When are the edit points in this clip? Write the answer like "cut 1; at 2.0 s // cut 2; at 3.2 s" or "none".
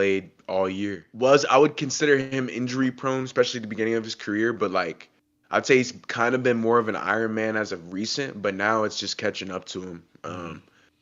cut 1; at 1.0 s